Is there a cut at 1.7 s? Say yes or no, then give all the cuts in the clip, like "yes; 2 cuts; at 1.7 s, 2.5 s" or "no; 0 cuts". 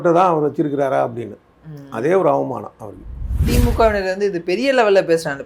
no; 1 cut; at 3.4 s